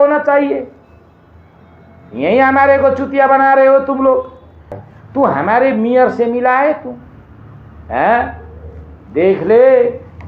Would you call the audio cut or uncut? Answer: cut